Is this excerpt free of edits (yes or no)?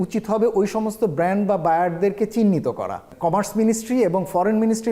yes